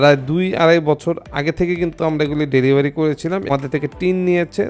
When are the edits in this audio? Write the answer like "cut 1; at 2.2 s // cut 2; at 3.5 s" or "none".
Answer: cut 1; at 3.5 s